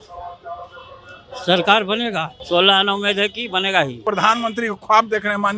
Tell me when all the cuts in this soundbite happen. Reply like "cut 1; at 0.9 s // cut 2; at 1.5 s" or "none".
cut 1; at 2.4 s // cut 2; at 4.1 s

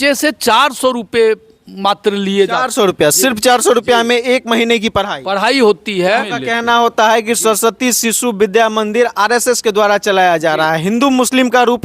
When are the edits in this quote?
cut 1; at 6.1 s

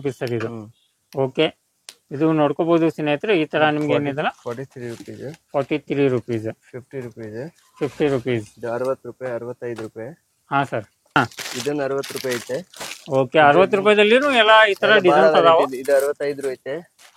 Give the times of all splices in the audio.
cut 1; at 11.2 s

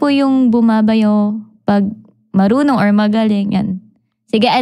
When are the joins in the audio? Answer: none

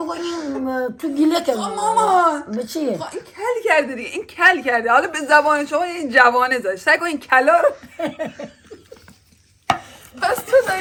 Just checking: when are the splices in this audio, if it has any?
none

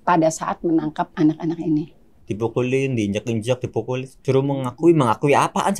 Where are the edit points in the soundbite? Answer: cut 1; at 1.1 s // cut 2; at 2.3 s // cut 3; at 4.1 s

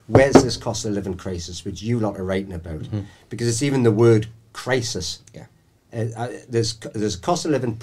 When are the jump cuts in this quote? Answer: none

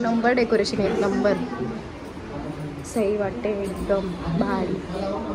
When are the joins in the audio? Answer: none

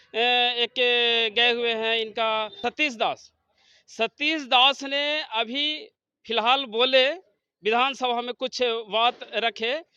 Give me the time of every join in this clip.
cut 1; at 2.6 s

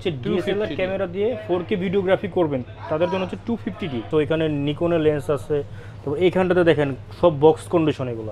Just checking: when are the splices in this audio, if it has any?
cut 1; at 4.1 s

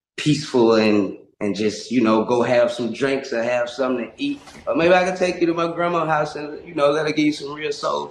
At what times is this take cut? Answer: none

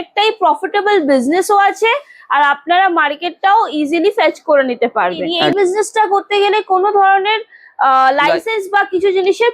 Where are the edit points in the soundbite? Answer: cut 1; at 5.3 s

